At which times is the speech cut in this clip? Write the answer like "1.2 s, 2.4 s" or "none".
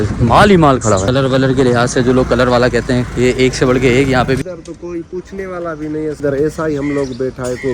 1.1 s, 4.4 s, 6.2 s